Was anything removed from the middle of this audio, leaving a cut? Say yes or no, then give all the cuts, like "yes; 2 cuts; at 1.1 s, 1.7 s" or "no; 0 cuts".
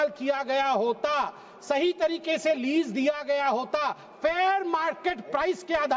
no; 0 cuts